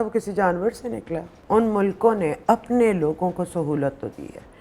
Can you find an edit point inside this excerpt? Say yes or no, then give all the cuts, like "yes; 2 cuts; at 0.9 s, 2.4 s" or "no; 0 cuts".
yes; 1 cut; at 1.4 s